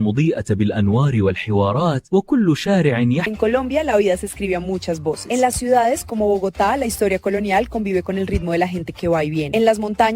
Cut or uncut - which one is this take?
cut